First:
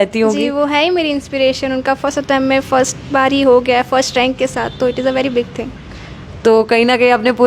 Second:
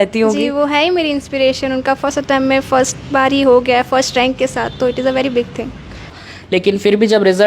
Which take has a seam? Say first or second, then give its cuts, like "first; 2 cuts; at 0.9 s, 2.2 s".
second; 1 cut; at 6.2 s